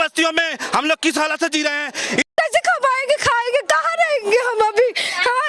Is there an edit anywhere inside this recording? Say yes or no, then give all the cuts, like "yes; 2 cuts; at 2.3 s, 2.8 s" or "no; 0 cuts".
yes; 1 cut; at 2.3 s